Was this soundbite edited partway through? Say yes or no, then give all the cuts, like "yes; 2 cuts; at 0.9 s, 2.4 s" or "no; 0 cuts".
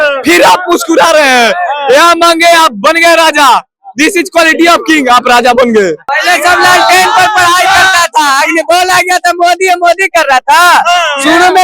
yes; 1 cut; at 6.1 s